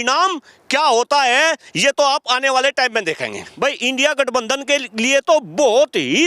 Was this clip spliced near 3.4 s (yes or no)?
yes